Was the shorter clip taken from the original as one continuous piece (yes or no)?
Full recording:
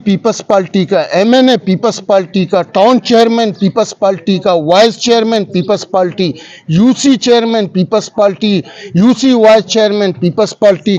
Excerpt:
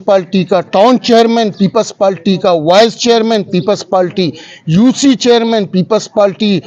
yes